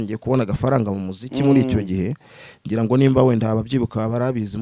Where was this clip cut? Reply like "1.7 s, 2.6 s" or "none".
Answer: none